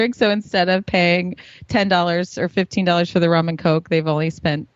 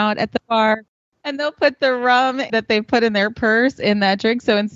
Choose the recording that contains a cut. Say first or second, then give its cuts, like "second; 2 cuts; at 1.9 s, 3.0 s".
second; 2 cuts; at 0.9 s, 2.5 s